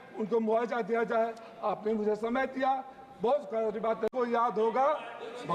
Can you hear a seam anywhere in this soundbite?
yes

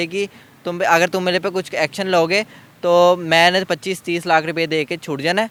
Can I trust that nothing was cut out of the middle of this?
yes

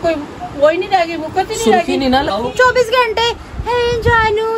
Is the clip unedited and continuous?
no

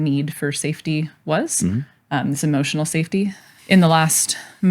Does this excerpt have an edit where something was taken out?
yes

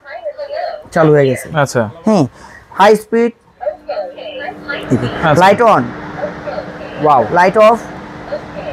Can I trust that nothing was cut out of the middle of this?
yes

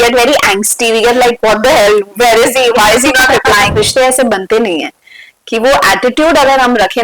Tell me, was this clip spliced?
yes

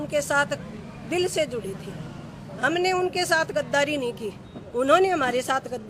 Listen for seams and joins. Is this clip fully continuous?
yes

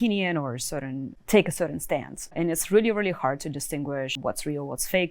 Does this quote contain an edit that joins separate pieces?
yes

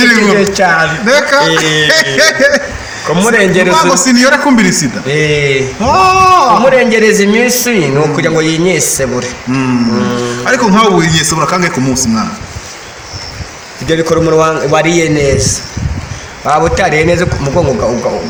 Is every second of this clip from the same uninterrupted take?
yes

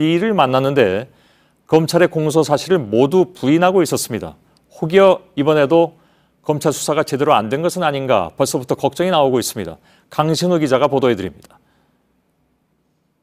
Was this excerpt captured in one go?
no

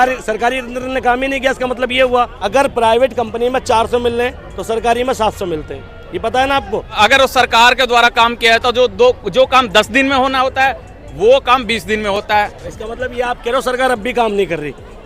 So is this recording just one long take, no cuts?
no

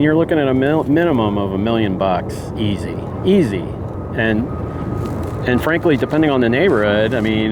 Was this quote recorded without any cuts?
yes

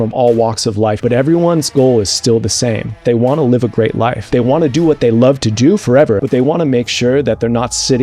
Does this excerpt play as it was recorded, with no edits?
no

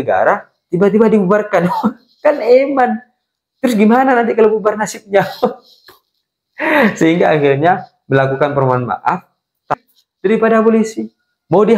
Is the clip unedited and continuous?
no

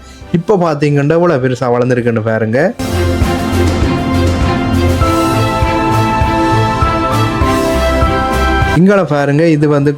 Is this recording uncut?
yes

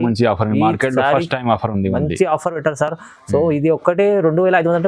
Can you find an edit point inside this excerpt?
no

